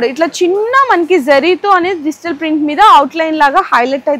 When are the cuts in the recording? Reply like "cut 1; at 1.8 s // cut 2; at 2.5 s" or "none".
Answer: none